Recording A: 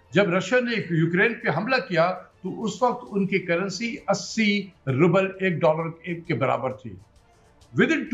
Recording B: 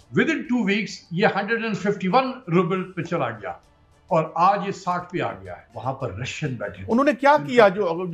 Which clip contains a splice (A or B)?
B